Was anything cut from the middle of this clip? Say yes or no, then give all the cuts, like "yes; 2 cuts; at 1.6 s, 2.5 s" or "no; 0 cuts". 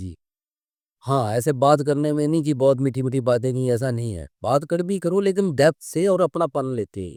no; 0 cuts